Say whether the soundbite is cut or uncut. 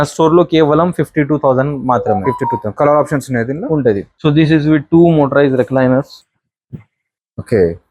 cut